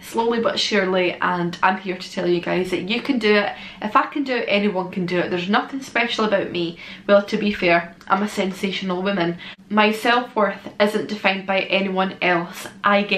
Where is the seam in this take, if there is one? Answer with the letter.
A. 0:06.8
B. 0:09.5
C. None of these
B